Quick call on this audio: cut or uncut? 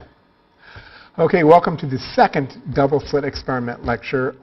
cut